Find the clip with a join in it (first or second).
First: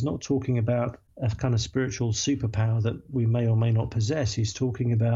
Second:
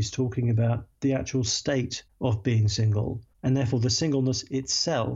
second